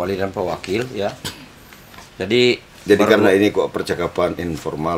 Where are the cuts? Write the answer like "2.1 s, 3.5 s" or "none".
none

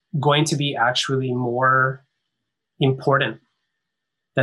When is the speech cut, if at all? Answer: none

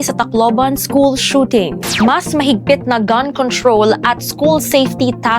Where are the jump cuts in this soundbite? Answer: 1.8 s

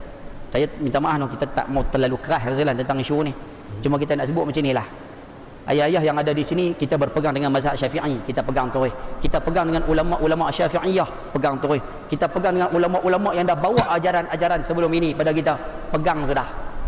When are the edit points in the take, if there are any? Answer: none

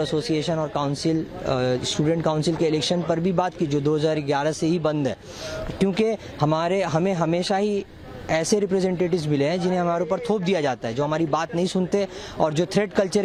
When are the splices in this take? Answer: none

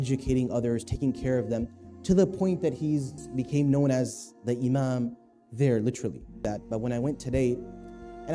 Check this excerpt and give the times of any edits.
6.4 s

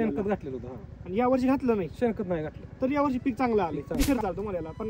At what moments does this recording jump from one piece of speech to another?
4.0 s

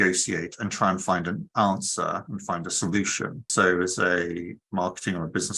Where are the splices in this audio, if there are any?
3.5 s

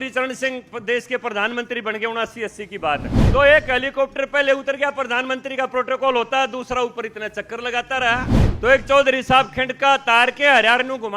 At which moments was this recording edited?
3.1 s, 8.4 s

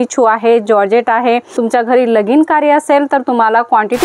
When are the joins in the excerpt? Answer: 1.5 s

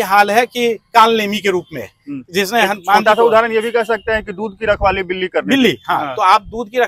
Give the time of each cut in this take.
none

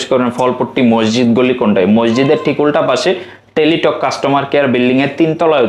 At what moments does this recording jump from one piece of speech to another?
none

